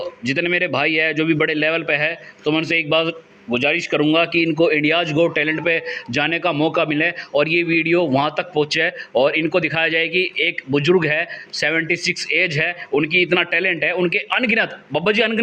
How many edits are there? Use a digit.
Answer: 0